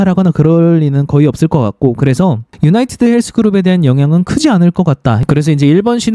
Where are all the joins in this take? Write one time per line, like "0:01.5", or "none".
0:05.1